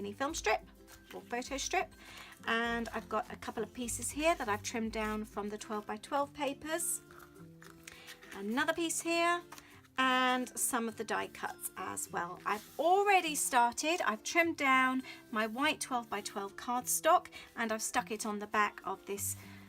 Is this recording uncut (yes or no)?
no